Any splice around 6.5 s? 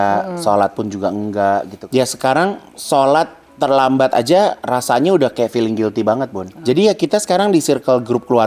yes; 3 cuts; at 1.8 s, 2.7 s, 6.5 s

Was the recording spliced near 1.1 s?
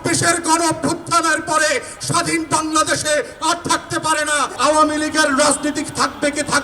no; 1 cut; at 4.5 s

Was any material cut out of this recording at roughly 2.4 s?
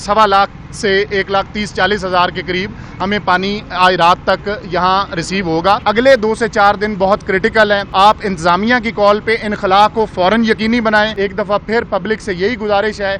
no; 3 cuts; at 5.8 s, 7.9 s, 11.1 s

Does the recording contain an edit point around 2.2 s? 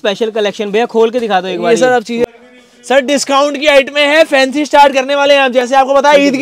yes; 1 cut; at 2.2 s

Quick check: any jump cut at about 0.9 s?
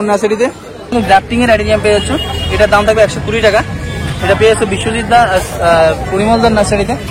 yes; 1 cut; at 0.9 s

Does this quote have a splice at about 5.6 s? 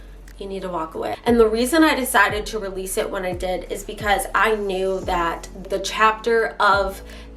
yes; 2 cuts; at 1.2 s, 5.6 s

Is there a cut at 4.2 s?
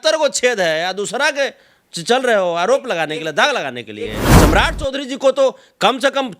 yes; 1 cut; at 4.2 s

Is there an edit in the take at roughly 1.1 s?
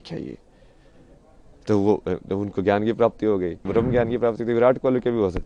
no; 1 cut; at 3.6 s

